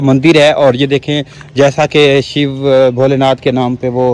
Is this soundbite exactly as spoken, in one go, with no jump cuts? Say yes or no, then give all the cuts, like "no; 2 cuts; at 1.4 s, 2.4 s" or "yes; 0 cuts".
yes; 0 cuts